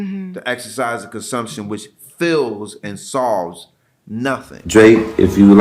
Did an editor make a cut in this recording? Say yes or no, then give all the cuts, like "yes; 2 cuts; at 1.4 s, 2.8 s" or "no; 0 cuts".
yes; 1 cut; at 4.5 s